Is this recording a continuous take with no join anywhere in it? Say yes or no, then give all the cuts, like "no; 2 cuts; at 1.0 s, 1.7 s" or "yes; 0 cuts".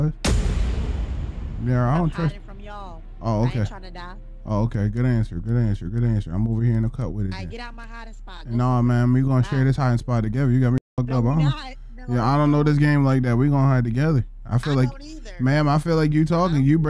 yes; 0 cuts